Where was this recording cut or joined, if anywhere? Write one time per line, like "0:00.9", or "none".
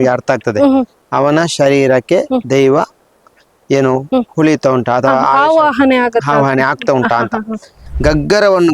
0:07.8